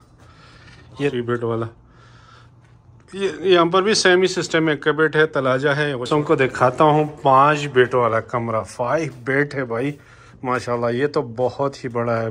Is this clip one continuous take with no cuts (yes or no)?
no